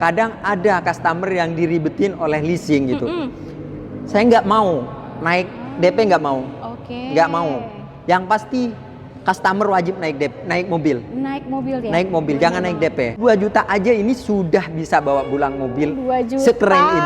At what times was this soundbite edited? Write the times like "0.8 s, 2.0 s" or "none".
13.2 s